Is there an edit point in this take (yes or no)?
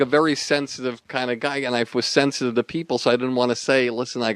no